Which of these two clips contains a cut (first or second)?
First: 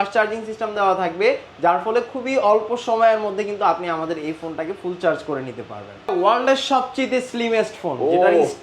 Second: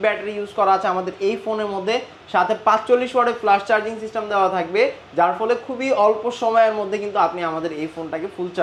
first